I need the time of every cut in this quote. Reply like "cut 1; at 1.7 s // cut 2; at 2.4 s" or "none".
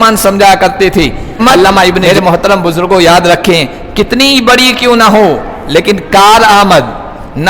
cut 1; at 2.0 s